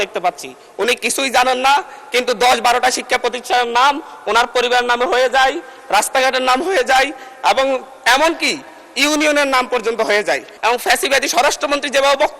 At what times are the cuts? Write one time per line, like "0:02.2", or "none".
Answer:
0:10.5